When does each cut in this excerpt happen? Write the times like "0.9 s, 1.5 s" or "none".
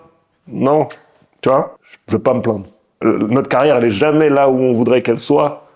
1.8 s, 2.8 s